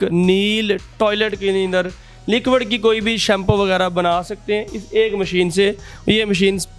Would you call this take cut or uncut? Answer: uncut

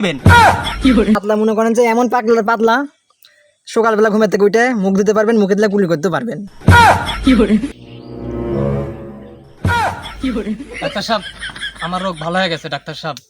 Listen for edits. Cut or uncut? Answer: cut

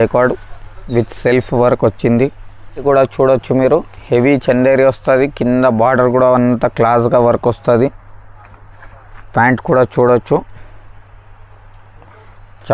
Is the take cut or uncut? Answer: cut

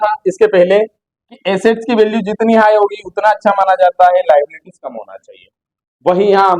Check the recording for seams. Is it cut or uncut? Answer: uncut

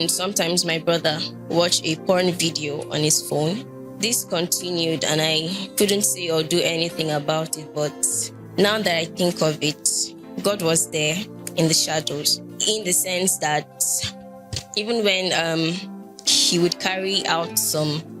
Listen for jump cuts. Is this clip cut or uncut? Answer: uncut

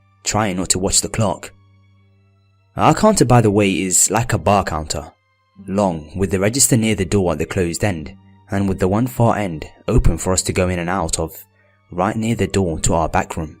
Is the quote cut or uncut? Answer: cut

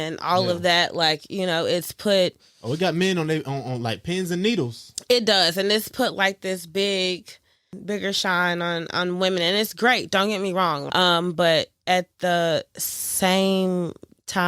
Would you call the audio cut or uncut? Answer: cut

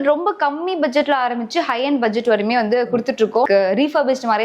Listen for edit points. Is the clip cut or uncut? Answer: cut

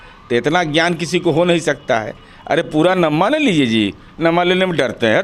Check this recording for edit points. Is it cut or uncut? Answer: uncut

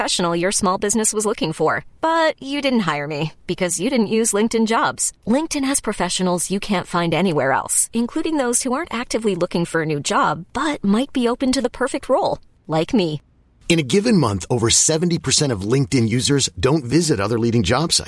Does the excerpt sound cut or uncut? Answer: uncut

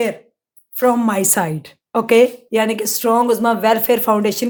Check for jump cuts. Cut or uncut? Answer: uncut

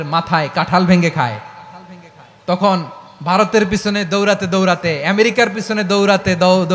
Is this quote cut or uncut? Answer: uncut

